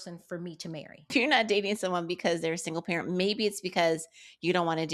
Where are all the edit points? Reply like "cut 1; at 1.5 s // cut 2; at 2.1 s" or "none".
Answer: cut 1; at 1.1 s